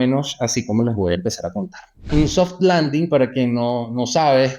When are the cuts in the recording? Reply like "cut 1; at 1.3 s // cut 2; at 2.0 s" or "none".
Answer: cut 1; at 2.1 s